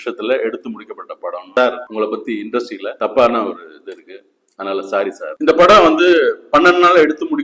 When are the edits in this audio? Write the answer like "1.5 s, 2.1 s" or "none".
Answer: 1.4 s, 5.3 s